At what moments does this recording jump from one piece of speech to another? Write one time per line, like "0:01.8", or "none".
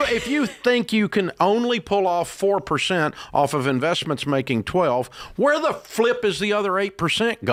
none